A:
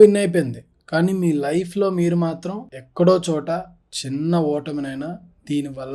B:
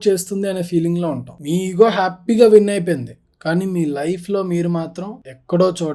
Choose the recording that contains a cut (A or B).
B